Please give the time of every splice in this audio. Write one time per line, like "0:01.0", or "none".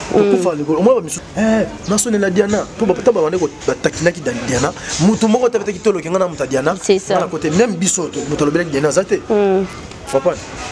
0:01.1